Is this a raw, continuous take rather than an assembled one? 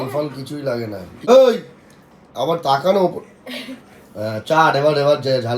no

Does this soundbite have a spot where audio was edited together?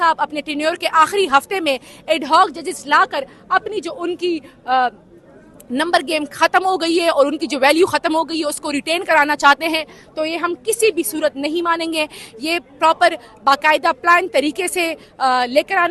no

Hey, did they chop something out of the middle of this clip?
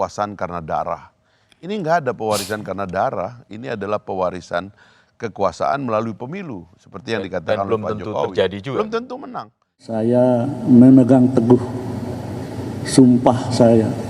yes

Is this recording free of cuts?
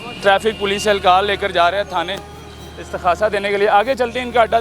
yes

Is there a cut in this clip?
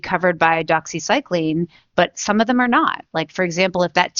no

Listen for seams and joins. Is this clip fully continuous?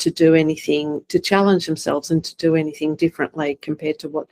yes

